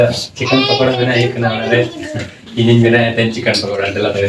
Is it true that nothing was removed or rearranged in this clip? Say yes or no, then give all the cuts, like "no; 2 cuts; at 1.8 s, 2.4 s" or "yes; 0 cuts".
yes; 0 cuts